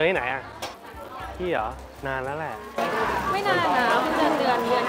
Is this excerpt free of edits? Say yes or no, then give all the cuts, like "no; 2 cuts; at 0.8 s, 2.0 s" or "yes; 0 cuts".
yes; 0 cuts